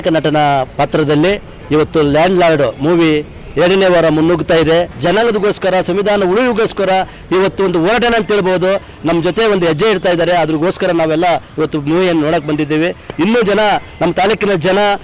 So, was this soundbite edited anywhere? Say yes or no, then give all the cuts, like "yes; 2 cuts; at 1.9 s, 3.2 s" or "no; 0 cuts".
yes; 1 cut; at 4.9 s